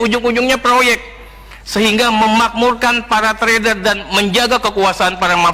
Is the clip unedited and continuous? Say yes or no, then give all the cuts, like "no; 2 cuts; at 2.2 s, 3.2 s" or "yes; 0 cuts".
yes; 0 cuts